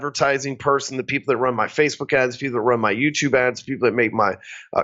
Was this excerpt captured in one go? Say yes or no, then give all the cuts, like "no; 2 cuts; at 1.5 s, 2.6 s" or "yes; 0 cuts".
yes; 0 cuts